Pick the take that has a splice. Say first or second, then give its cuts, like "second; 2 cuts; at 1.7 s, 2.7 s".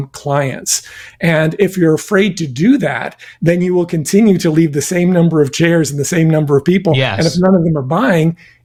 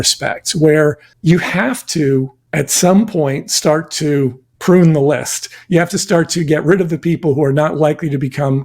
second; 3 cuts; at 1.1 s, 2.4 s, 4.5 s